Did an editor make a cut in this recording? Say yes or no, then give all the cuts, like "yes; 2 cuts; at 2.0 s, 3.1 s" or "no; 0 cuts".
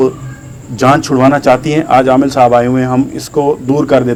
no; 0 cuts